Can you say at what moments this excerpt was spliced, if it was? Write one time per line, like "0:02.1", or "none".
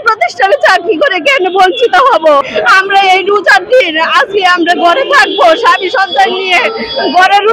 0:02.5

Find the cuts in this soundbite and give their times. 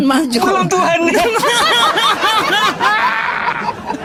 none

